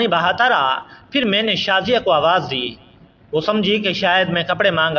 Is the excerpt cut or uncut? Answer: uncut